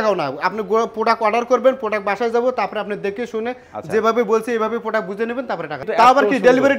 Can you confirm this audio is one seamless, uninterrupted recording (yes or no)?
no